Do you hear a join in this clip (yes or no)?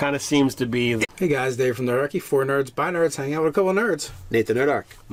no